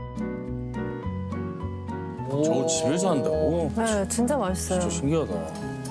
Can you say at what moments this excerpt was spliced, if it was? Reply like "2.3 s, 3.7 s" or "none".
none